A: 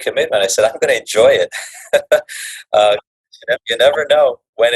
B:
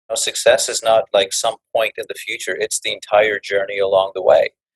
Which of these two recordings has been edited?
A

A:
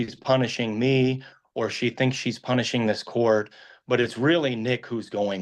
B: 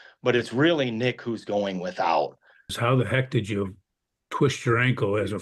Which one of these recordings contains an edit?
B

